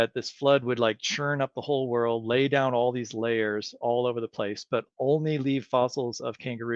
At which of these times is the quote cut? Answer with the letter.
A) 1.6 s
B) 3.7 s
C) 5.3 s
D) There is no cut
D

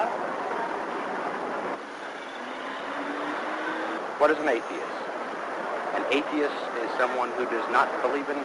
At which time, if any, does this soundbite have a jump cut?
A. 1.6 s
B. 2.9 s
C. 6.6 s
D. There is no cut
B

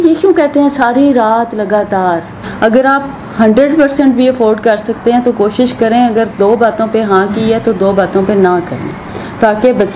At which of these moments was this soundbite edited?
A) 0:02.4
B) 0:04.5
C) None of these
A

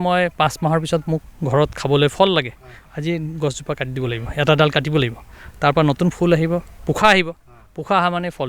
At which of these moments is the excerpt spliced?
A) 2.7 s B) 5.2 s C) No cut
C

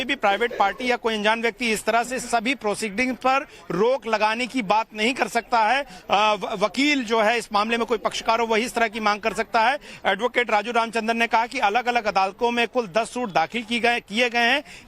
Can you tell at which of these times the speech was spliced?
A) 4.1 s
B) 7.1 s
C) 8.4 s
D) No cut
B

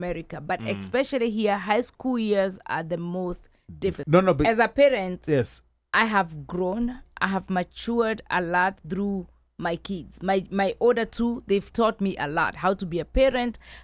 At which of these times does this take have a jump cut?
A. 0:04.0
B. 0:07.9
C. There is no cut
A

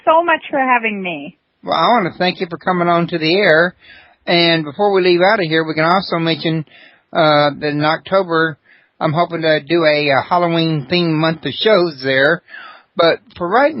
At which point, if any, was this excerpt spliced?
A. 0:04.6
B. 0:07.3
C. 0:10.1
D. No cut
D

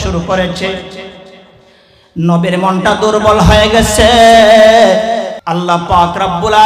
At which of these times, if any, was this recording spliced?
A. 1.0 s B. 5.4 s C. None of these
B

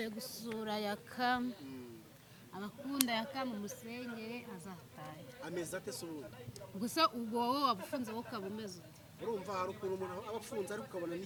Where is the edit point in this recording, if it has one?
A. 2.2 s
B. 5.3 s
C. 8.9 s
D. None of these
D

